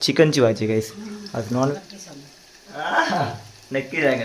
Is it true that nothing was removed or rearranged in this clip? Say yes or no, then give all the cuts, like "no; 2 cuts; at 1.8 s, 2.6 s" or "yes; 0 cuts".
no; 1 cut; at 1.7 s